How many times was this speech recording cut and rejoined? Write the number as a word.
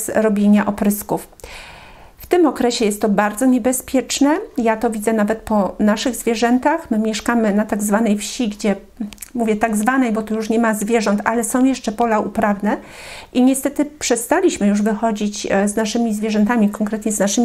zero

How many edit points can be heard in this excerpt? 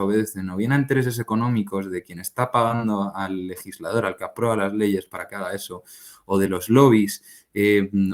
zero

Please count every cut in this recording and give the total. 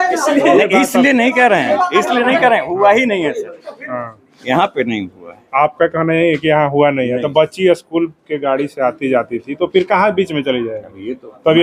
zero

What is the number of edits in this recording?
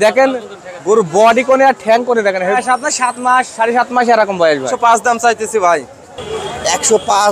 two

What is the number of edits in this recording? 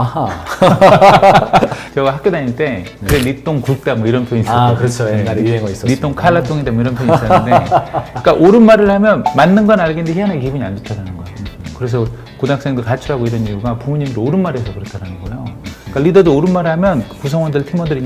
one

